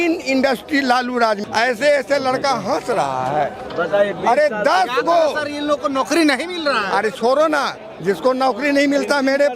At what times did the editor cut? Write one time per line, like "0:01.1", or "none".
0:01.4